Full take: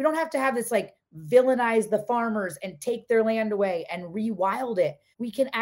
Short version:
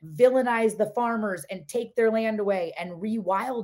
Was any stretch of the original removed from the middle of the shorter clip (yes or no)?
no